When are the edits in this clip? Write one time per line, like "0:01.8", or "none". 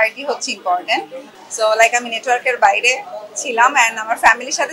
0:01.2